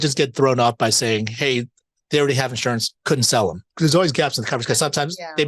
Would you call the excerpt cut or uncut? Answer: cut